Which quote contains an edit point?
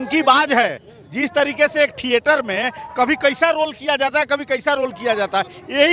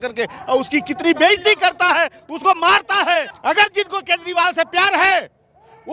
second; 1 cut; at 3.3 s

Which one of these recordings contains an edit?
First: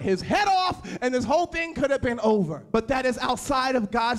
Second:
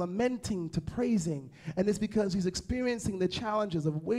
first; 1 cut; at 2.6 s

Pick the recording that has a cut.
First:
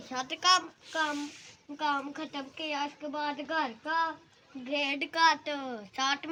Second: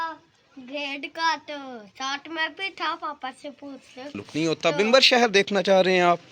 second; 1 cut; at 4.2 s

